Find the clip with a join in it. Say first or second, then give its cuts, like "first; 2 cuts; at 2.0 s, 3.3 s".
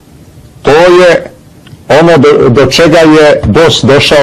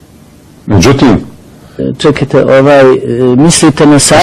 first; 1 cut; at 2.5 s